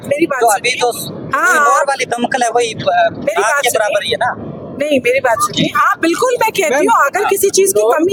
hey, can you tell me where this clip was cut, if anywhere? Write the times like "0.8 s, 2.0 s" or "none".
none